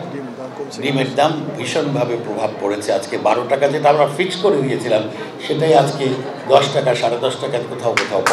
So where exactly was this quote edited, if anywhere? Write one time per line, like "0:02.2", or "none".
none